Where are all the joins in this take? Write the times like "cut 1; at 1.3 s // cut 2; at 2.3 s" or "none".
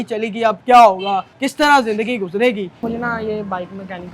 cut 1; at 2.8 s